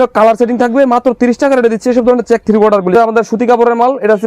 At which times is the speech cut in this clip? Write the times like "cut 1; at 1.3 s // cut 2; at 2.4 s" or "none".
cut 1; at 2.9 s